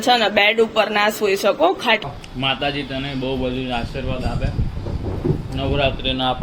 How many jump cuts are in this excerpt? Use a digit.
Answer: 1